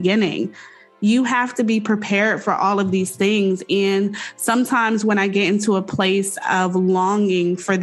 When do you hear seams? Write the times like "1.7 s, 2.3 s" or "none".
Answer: none